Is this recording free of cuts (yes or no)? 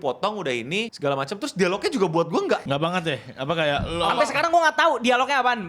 no